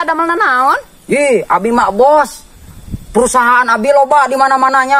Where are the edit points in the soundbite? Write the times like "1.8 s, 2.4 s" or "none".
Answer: none